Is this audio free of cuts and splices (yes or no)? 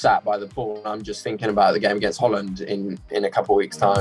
yes